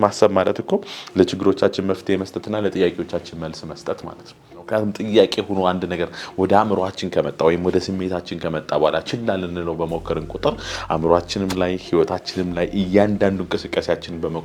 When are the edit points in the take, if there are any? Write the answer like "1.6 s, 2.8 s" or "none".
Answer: 4.5 s